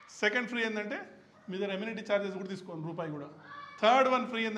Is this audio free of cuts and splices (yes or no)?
yes